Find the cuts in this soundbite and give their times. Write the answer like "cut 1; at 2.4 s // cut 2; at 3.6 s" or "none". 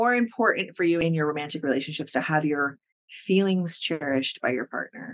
cut 1; at 1.0 s